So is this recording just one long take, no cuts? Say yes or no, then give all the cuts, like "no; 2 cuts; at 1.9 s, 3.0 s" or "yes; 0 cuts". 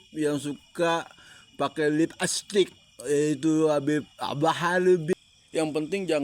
no; 1 cut; at 5.1 s